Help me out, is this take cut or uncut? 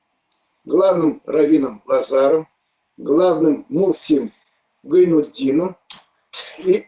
uncut